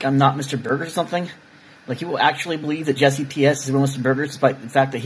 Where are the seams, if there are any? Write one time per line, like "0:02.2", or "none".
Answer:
none